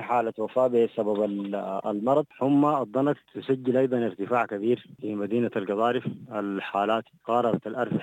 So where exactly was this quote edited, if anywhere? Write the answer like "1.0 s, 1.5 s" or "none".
2.3 s, 3.3 s, 5.0 s, 7.1 s